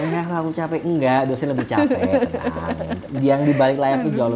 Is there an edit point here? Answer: no; 0 cuts

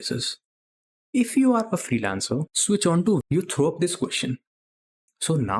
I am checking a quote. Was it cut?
yes; 2 cuts; at 2.5 s, 3.2 s

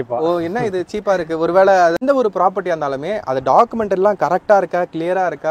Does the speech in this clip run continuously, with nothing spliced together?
no; 1 cut; at 2.0 s

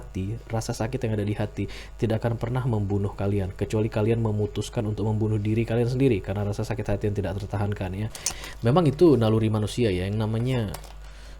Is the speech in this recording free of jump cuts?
no; 1 cut; at 8.2 s

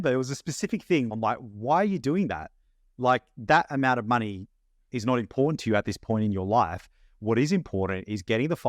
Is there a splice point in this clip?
yes; 1 cut; at 1.1 s

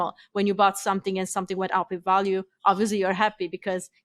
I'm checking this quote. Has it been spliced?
no; 0 cuts

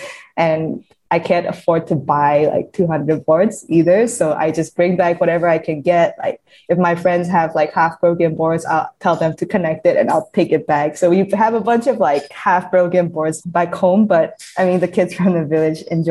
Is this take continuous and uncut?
no; 2 cuts; at 12.3 s, 13.4 s

